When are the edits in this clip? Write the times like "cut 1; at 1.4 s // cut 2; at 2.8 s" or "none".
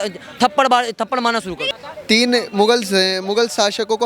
cut 1; at 1.7 s